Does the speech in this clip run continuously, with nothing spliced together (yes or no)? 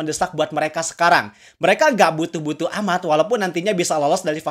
yes